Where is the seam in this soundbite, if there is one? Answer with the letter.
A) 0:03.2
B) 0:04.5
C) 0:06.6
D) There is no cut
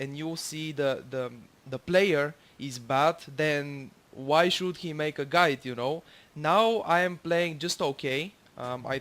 C